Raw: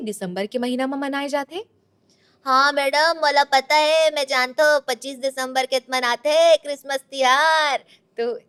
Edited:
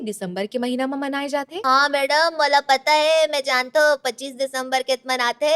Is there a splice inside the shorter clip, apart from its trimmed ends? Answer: yes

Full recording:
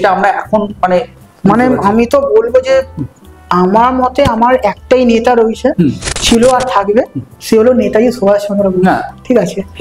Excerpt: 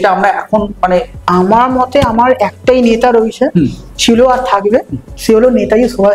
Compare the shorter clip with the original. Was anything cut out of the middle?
yes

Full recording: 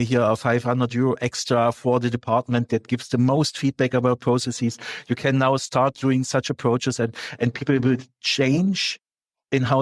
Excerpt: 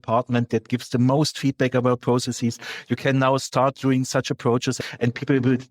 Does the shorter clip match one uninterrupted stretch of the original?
no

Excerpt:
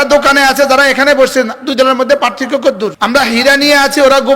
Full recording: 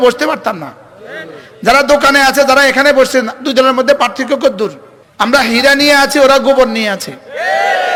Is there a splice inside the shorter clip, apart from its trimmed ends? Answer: yes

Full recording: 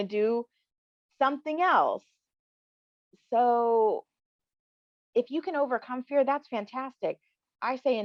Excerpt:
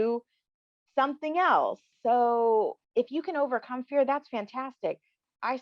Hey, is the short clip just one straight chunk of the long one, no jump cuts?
no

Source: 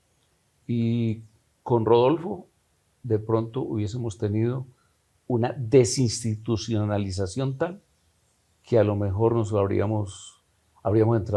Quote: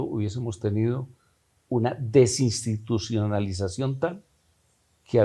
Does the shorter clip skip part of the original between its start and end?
no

